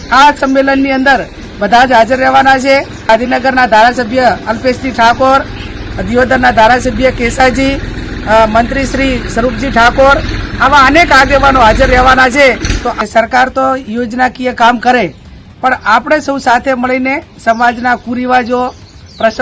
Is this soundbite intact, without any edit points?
no; 2 cuts; at 3.1 s, 12.9 s

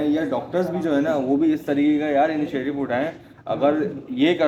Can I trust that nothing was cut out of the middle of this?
yes; 0 cuts

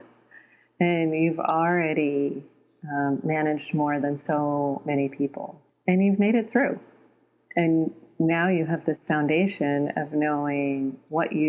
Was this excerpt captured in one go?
yes; 0 cuts

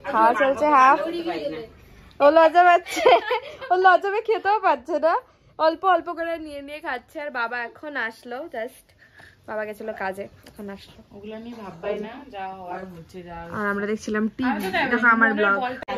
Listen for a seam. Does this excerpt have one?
no; 0 cuts

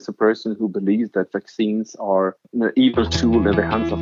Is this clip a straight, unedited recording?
no; 1 cut; at 2.4 s

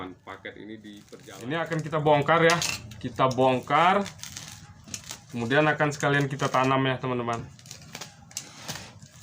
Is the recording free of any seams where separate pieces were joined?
no; 1 cut; at 1.1 s

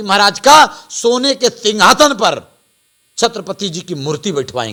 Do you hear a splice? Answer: no; 0 cuts

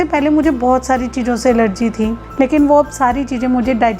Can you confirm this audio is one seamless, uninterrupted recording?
no; 1 cut; at 2.2 s

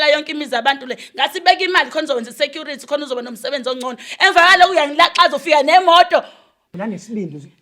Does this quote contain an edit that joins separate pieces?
yes; 1 cut; at 6.6 s

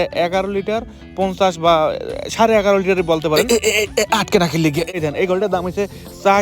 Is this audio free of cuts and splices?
no; 1 cut; at 4.9 s

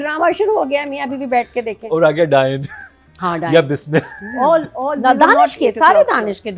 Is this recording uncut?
yes; 0 cuts

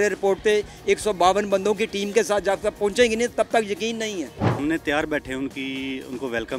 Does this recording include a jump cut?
yes; 1 cut; at 4.6 s

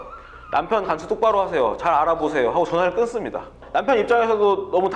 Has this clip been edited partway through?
no; 0 cuts

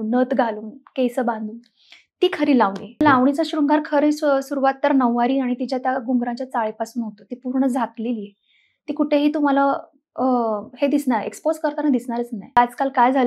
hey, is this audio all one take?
no; 2 cuts; at 3.0 s, 12.6 s

